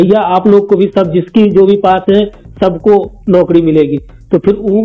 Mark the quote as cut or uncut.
uncut